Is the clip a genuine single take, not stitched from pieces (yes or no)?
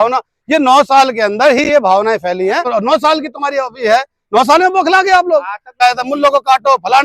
no